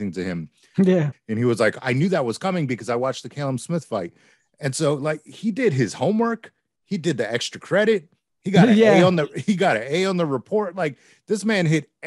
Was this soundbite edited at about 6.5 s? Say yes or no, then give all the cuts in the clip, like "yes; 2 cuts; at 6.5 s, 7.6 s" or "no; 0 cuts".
no; 1 cut; at 1.1 s